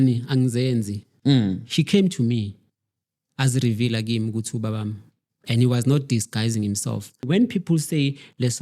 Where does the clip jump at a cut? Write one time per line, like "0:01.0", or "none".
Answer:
0:01.0
0:07.2

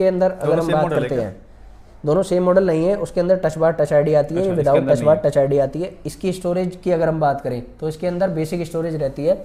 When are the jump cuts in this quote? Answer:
none

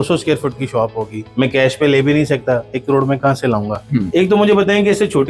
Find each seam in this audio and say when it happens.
0:01.2
0:04.1

